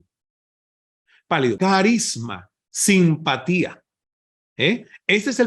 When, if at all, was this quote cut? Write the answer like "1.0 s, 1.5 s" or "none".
1.6 s